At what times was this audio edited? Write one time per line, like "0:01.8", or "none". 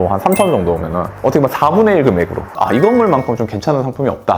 0:02.5

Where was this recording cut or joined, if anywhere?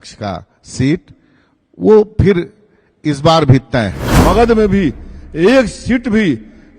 0:04.1

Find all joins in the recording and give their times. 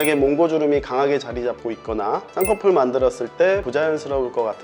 0:02.3
0:03.6

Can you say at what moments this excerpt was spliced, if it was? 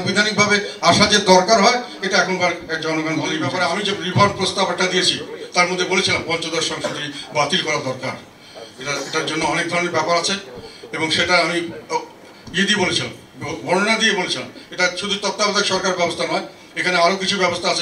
0:03.5

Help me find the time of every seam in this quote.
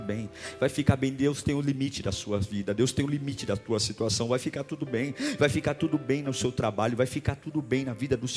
none

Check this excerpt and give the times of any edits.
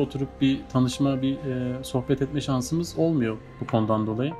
none

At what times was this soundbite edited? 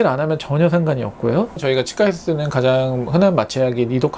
0:01.5

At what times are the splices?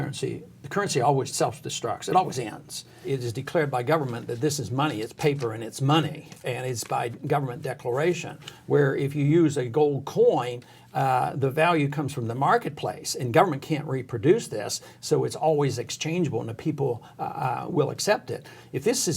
0:01.3
0:03.0

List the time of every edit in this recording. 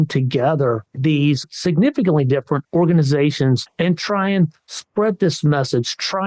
0:01.5
0:02.6
0:03.7

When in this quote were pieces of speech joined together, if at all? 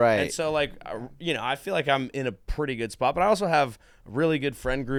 none

